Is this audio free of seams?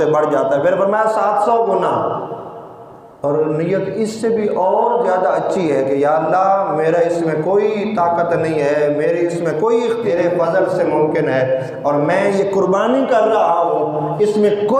no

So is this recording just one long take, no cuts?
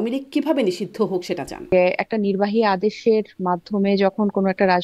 no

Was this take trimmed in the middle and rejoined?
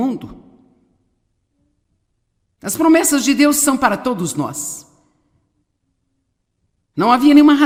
no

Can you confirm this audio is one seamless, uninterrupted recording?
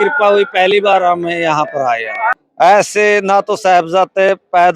no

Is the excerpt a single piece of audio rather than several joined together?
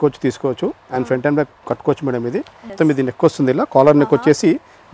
no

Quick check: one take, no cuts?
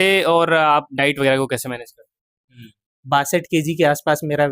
no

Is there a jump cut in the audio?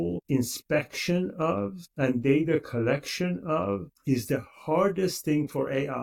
no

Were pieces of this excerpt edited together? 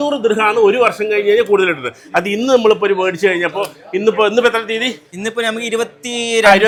no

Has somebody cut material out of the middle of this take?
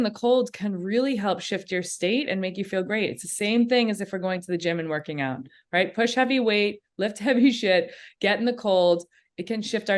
no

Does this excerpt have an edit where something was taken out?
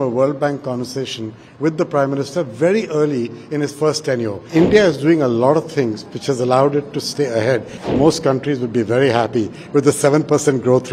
yes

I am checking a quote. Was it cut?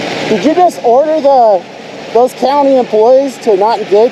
no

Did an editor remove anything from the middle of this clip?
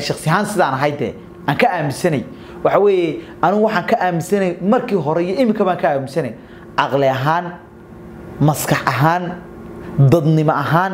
no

